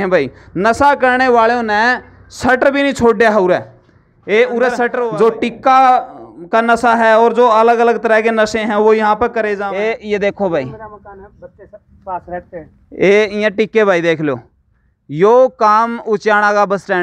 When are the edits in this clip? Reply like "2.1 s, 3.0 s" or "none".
5.0 s, 9.6 s